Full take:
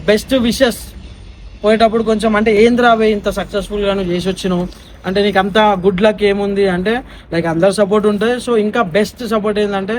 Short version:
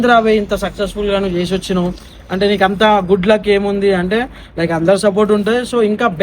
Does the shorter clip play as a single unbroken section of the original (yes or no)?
yes